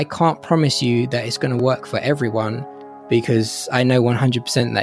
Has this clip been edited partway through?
no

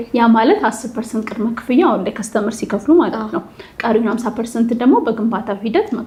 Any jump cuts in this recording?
no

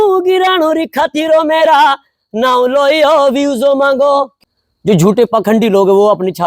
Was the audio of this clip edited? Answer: yes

